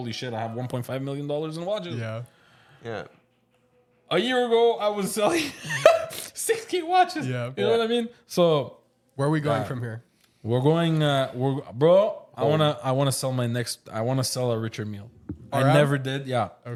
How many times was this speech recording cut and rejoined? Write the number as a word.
zero